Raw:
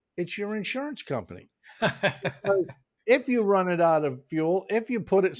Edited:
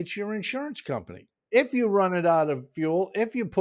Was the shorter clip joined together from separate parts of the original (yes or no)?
yes